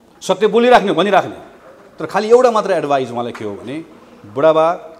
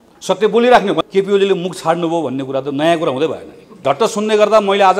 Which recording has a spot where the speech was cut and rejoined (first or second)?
second